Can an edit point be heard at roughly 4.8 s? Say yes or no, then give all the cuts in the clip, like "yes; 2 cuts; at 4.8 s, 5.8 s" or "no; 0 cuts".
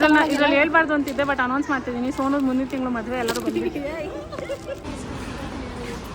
yes; 1 cut; at 4.8 s